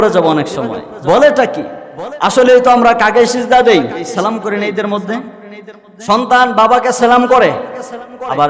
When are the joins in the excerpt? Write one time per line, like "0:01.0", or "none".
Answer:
0:04.1